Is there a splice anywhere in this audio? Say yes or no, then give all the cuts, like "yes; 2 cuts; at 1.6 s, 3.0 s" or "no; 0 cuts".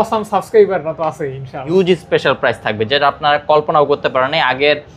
yes; 1 cut; at 1.6 s